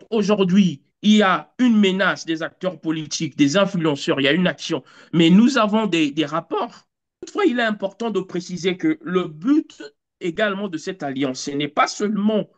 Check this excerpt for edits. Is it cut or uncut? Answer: cut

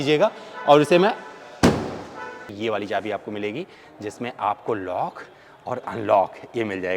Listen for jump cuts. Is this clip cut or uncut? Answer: cut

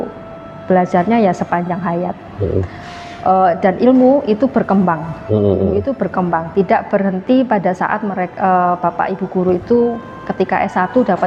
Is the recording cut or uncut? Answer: uncut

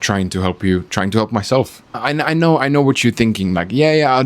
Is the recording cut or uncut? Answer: cut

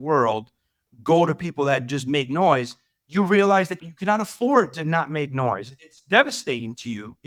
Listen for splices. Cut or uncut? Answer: uncut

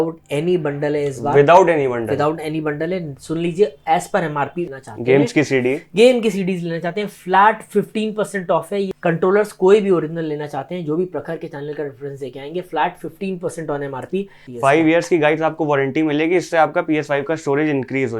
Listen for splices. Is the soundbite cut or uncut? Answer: cut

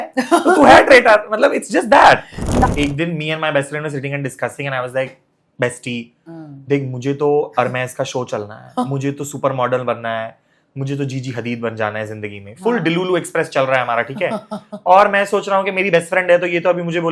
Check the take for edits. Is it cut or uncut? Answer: cut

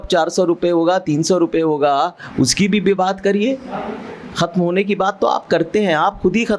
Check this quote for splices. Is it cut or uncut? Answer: uncut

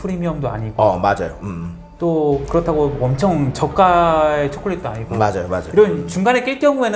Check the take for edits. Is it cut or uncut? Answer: uncut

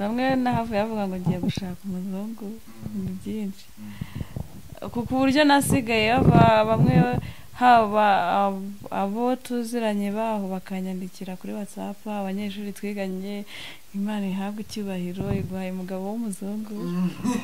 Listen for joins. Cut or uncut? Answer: uncut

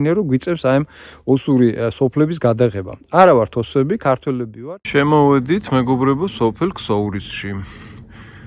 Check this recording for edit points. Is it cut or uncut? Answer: cut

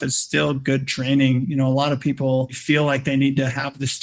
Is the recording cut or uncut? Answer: cut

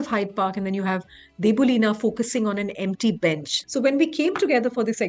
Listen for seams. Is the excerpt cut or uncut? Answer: cut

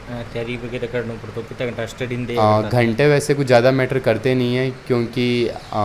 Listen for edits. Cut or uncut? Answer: uncut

